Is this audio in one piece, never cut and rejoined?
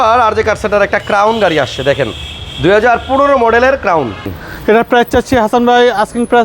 no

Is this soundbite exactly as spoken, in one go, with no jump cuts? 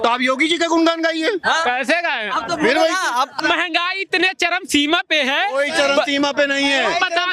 no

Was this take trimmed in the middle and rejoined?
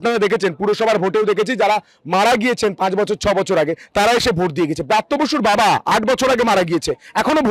no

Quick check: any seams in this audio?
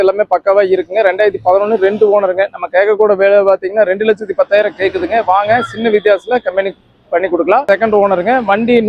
yes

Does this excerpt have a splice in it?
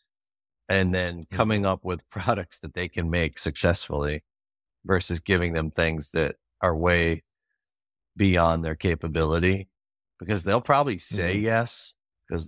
no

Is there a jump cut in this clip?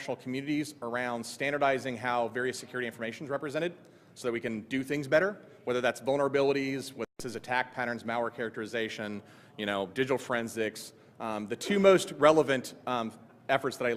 yes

